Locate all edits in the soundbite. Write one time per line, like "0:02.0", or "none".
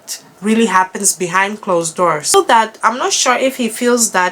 0:02.3